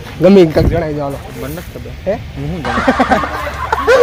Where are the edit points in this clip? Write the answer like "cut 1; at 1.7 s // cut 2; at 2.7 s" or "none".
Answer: none

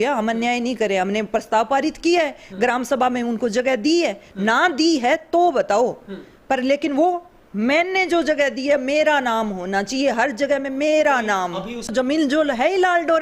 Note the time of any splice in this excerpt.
cut 1; at 11.9 s

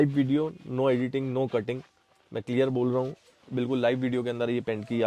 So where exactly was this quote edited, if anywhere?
none

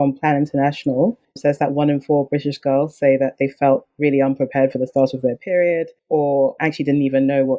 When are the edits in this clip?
cut 1; at 1.3 s // cut 2; at 5.9 s

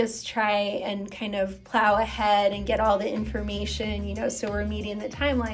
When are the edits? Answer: none

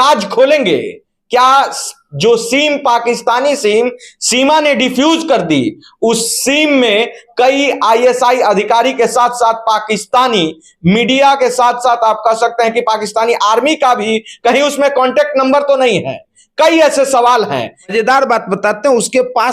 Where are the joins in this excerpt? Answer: cut 1; at 17.9 s

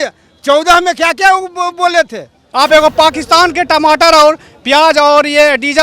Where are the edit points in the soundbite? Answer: cut 1; at 2.4 s

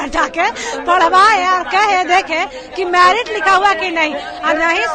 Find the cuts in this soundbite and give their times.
none

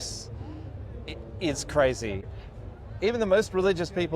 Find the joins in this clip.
cut 1; at 2.3 s

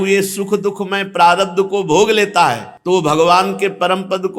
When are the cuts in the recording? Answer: cut 1; at 2.7 s

